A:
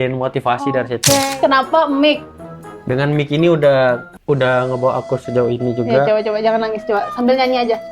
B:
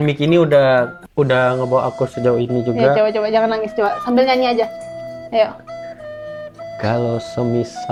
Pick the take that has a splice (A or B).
A